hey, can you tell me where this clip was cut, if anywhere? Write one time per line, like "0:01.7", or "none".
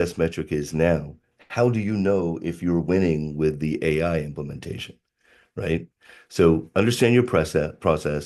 none